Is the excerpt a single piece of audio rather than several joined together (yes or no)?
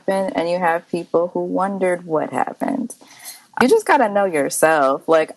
no